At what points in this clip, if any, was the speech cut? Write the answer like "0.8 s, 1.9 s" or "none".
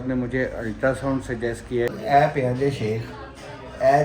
1.9 s